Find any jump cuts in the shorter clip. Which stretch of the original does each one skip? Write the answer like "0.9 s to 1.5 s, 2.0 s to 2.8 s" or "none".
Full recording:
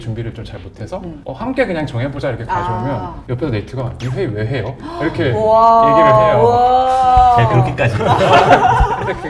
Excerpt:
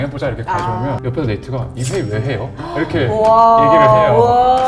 3.0 s to 3.2 s